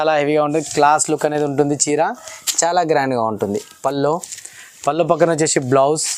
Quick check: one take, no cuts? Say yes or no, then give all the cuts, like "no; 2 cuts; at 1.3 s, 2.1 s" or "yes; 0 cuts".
yes; 0 cuts